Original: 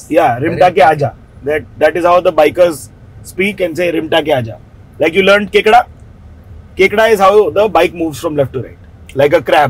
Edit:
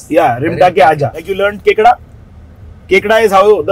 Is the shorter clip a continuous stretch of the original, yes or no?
no